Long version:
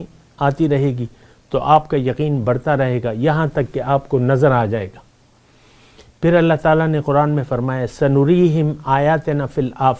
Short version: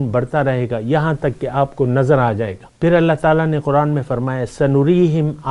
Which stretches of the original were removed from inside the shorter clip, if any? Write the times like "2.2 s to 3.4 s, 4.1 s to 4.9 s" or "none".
5.0 s to 6.0 s